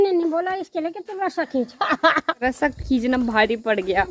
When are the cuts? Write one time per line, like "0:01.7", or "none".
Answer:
0:02.4